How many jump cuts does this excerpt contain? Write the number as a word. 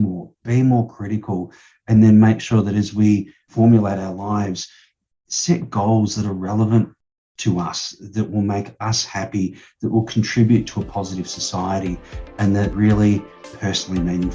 three